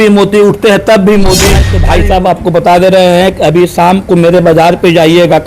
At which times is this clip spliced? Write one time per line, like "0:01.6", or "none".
0:01.8